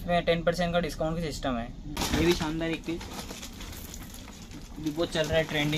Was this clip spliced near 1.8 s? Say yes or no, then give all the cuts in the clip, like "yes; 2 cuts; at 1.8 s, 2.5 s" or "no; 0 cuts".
yes; 1 cut; at 1.8 s